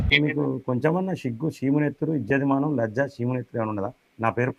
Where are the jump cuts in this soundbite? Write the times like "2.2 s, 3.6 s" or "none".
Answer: none